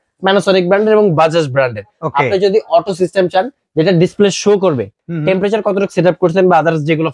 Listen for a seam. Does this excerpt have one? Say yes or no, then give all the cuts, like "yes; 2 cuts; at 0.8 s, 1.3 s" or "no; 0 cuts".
no; 0 cuts